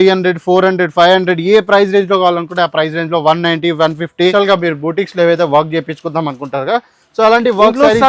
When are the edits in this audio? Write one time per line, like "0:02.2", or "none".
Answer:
0:04.3

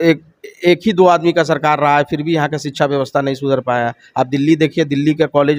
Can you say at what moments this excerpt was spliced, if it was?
none

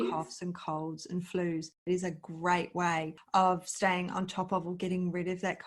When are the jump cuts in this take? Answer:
0:01.8

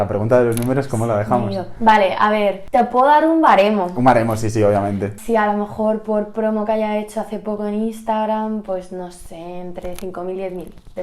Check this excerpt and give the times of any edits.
0:02.6
0:05.1

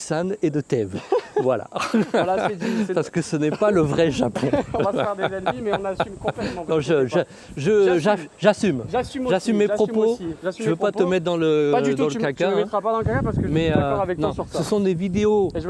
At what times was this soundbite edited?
none

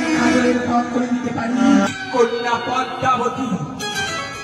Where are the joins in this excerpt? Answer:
0:01.9

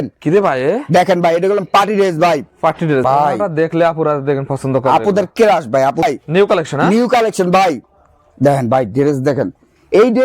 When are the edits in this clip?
0:03.0
0:06.0

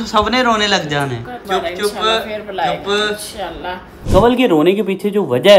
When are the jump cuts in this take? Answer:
0:01.3
0:04.0

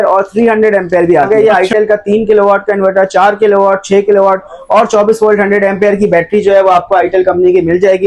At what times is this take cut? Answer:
0:01.3

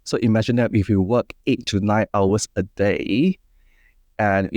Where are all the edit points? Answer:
none

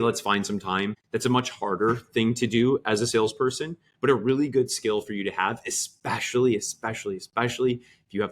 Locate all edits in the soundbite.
0:01.0

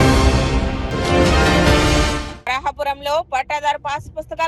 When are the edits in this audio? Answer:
none

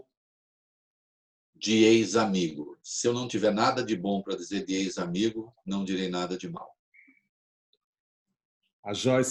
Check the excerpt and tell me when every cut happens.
none

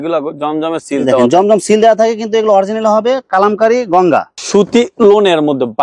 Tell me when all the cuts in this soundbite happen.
0:04.4

